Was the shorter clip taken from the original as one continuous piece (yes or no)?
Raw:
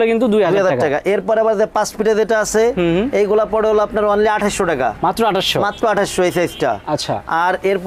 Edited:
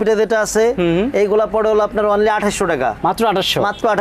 yes